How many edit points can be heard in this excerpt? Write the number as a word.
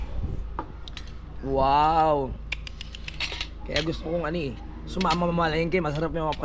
zero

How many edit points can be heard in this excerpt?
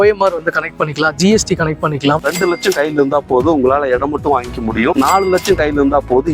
two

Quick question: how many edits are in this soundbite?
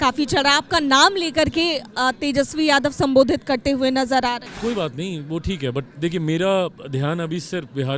one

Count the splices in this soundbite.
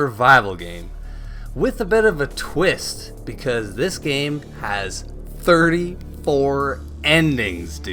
zero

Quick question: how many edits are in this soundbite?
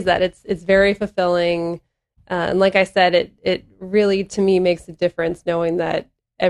zero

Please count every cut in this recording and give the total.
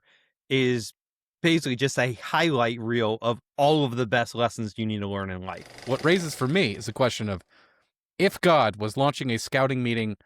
one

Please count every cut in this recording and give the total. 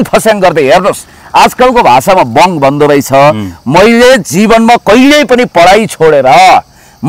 zero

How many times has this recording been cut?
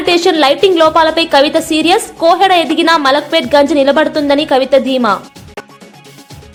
zero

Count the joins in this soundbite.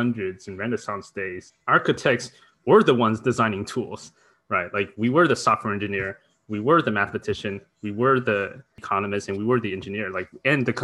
two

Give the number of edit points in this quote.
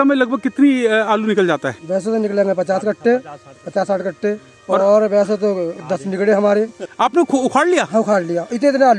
zero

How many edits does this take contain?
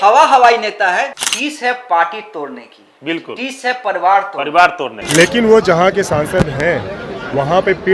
two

